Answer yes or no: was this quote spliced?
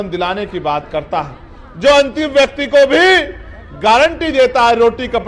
no